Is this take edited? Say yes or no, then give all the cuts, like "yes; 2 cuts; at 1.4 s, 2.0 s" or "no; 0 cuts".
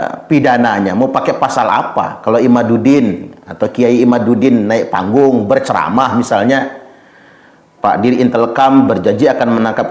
no; 0 cuts